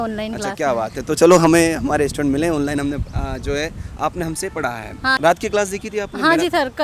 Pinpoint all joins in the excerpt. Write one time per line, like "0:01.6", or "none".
0:05.2